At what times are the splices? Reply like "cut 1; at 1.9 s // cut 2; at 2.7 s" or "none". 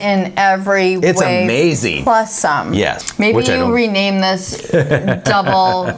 cut 1; at 3.0 s